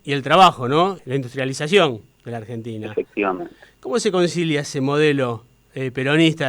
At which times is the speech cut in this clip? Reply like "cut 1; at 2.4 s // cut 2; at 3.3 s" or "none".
cut 1; at 1.0 s